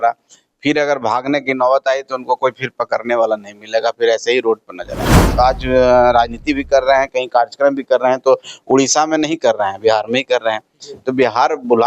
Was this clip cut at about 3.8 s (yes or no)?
no